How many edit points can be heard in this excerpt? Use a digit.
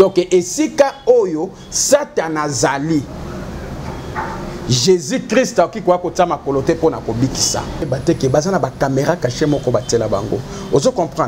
1